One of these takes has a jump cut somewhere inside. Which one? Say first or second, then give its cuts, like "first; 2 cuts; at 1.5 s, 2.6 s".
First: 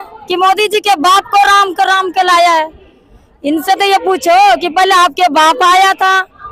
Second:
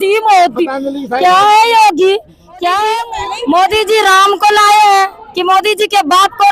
second; 1 cut; at 2.9 s